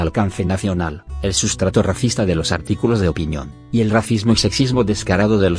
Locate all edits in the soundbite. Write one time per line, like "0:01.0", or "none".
0:04.0